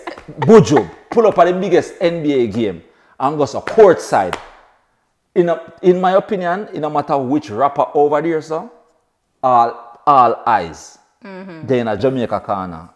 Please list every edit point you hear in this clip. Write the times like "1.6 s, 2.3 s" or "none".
12.0 s